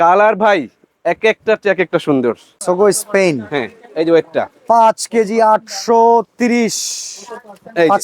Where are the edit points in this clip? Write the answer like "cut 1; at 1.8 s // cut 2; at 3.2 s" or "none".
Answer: cut 1; at 2.5 s

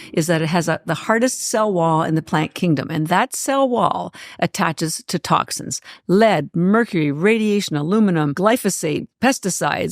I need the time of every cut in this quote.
cut 1; at 8.4 s

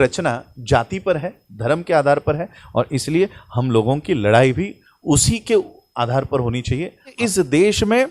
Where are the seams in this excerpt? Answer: cut 1; at 7.2 s

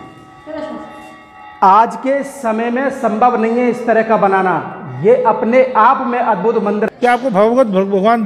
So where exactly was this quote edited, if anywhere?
cut 1; at 6.9 s

